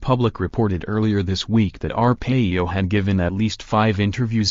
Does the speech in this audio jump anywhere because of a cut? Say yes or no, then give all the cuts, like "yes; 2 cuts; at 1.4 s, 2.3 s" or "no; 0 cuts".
no; 0 cuts